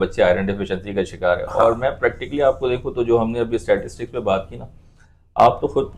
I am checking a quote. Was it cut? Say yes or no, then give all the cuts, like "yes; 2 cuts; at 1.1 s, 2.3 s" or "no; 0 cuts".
no; 0 cuts